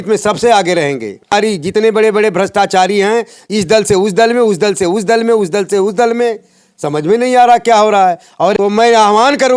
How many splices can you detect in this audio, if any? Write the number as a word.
two